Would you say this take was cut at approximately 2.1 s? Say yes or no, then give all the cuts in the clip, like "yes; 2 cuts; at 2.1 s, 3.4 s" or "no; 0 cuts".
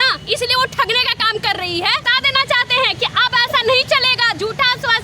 yes; 1 cut; at 2.1 s